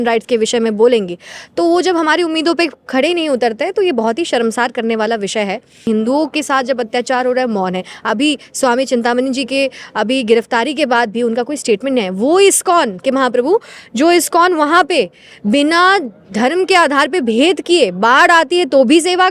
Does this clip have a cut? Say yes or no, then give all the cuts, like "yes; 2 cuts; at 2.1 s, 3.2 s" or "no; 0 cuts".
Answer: yes; 1 cut; at 5.9 s